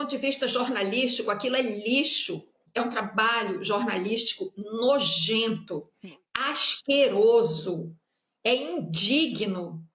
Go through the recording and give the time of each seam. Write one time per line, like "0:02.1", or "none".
0:02.5